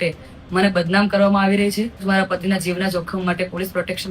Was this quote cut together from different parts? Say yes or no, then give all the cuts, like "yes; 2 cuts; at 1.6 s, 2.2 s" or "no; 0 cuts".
yes; 1 cut; at 2.0 s